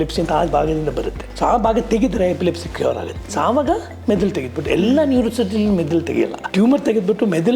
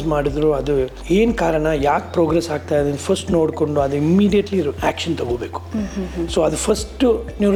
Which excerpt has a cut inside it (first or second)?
first